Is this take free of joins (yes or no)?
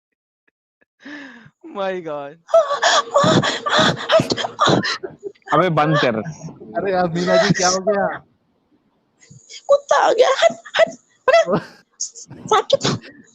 no